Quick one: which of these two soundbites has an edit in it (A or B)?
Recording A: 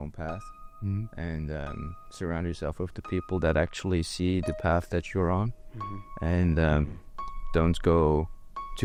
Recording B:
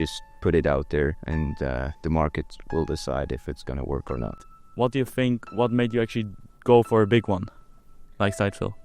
B